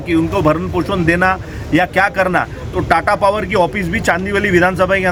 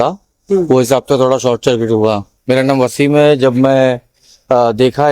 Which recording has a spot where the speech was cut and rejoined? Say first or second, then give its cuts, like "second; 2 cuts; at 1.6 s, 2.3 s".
second; 1 cut; at 2.3 s